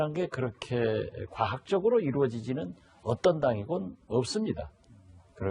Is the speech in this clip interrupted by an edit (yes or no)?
yes